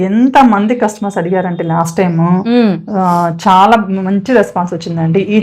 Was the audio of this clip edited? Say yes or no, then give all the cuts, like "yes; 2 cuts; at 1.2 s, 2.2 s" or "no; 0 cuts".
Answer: no; 0 cuts